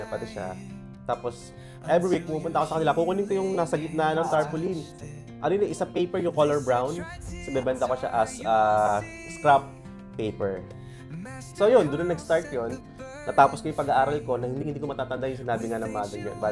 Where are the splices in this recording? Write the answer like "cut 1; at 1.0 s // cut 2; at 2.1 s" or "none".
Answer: none

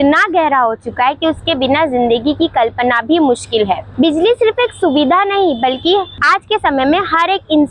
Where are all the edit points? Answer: none

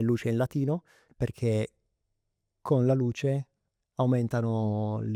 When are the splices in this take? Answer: none

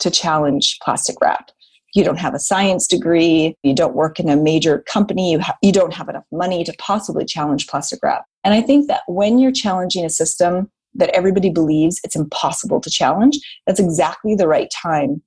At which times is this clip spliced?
cut 1; at 3.6 s // cut 2; at 8.2 s

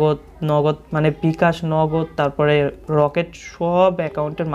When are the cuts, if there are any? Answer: none

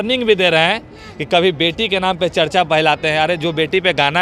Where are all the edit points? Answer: none

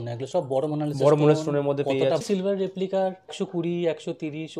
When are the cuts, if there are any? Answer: cut 1; at 2.2 s // cut 2; at 3.3 s

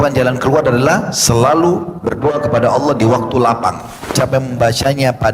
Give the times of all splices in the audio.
cut 1; at 4.1 s

